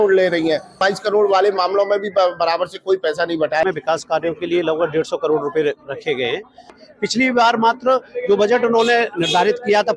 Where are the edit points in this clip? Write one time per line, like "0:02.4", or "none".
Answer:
0:00.8
0:03.6
0:06.8